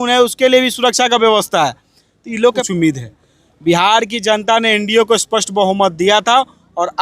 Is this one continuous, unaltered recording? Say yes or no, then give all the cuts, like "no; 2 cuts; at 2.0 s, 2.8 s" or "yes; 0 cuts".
no; 1 cut; at 2.6 s